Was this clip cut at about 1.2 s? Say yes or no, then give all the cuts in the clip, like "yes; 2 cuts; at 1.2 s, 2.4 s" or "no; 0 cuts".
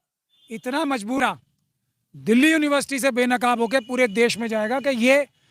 yes; 1 cut; at 1.2 s